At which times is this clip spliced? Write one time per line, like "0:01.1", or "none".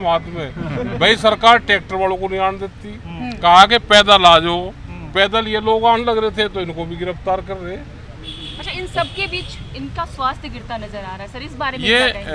none